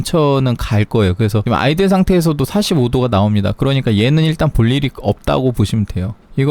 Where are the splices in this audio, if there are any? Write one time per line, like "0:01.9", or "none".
0:01.4